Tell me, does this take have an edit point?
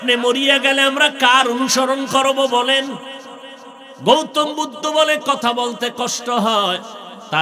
no; 0 cuts

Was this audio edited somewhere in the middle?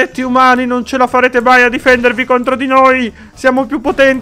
no; 0 cuts

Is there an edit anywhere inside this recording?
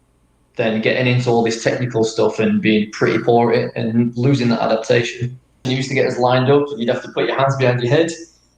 yes; 1 cut; at 5.6 s

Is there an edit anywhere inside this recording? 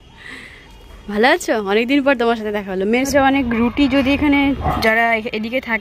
yes; 1 cut; at 3.1 s

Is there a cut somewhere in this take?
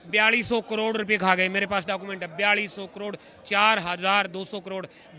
no; 0 cuts

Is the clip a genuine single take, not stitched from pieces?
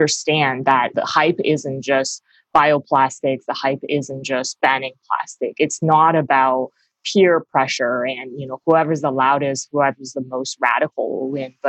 no; 2 cuts; at 5.8 s, 8.6 s

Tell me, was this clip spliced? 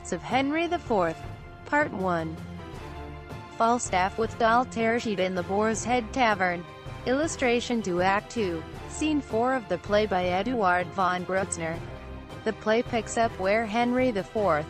no; 0 cuts

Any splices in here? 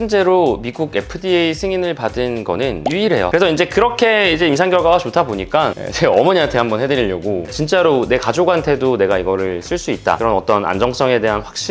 yes; 2 cuts; at 3.3 s, 5.8 s

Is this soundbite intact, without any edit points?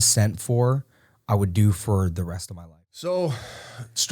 no; 1 cut; at 2.4 s

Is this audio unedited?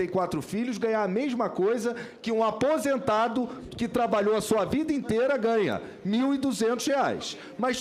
yes; 0 cuts

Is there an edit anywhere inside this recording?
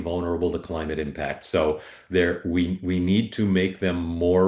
no; 0 cuts

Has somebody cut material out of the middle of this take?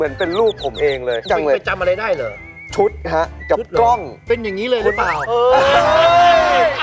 no; 0 cuts

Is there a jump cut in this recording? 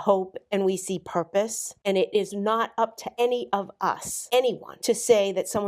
yes; 4 cuts; at 1.7 s, 3.0 s, 4.1 s, 4.7 s

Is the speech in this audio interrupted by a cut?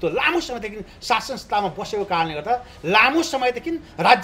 no; 0 cuts

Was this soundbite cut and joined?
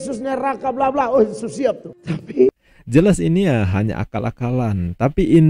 yes; 1 cut; at 2.6 s

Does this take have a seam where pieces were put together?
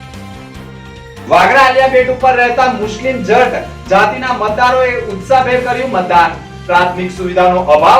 yes; 1 cut; at 1.2 s

